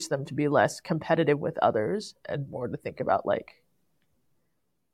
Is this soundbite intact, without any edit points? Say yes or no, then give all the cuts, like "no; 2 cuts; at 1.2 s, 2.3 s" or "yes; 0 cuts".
yes; 0 cuts